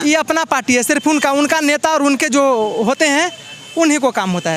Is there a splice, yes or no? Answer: no